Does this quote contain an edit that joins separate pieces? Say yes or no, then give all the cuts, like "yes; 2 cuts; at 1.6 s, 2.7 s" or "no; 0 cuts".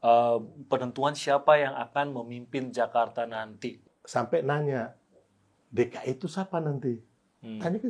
yes; 1 cut; at 3.7 s